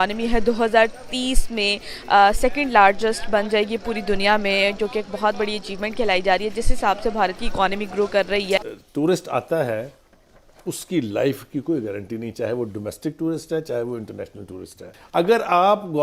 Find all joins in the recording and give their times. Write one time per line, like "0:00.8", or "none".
0:08.7
0:14.9